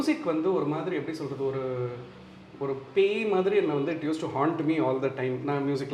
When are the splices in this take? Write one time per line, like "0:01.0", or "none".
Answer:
none